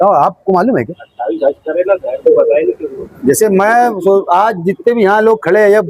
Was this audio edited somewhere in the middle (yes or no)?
no